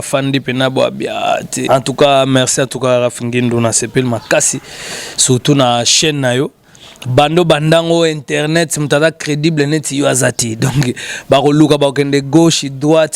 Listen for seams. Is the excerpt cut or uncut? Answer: cut